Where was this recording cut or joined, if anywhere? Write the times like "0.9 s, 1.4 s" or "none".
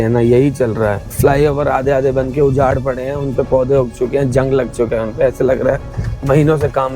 1.1 s